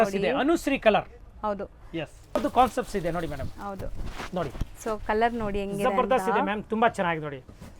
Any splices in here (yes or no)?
yes